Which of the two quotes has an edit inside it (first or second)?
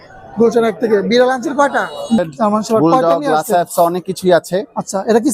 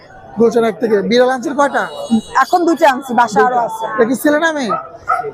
first